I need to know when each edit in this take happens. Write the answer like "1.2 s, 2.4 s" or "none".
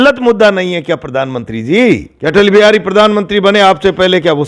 2.1 s